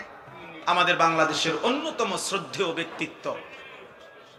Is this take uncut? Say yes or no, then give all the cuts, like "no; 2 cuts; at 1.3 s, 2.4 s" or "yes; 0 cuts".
yes; 0 cuts